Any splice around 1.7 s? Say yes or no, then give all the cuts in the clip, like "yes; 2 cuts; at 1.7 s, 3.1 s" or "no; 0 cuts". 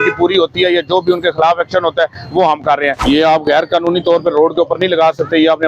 no; 1 cut; at 3.0 s